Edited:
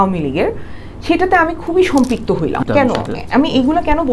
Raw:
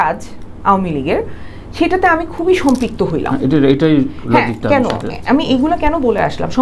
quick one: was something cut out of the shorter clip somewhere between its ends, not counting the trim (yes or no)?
yes